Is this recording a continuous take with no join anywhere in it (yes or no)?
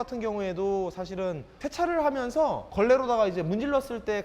no